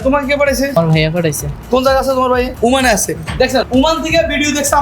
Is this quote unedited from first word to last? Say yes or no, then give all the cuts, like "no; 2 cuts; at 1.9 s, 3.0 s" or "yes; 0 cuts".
no; 3 cuts; at 0.8 s, 2.5 s, 3.7 s